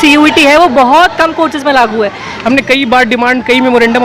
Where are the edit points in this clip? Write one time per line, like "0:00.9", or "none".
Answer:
0:02.3